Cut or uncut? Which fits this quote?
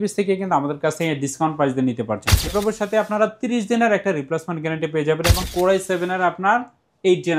cut